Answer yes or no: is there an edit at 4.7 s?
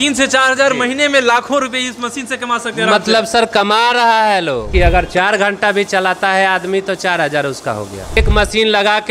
yes